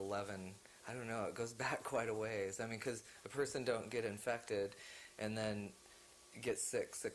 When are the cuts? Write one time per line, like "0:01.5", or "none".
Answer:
none